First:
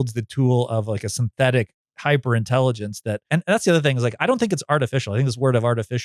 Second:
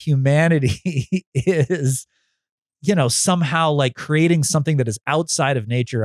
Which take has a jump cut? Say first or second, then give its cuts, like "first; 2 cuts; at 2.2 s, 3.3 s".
first; 1 cut; at 3.2 s